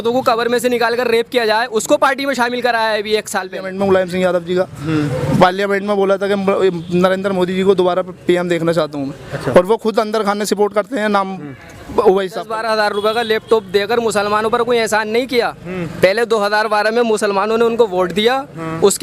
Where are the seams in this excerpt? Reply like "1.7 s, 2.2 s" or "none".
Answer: 3.6 s, 12.5 s